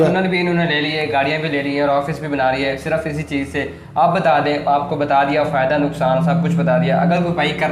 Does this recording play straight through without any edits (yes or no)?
yes